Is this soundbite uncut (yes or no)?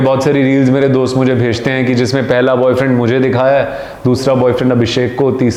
yes